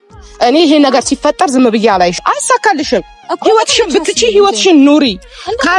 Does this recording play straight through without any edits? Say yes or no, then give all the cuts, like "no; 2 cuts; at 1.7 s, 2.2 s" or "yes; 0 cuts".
no; 1 cut; at 2.2 s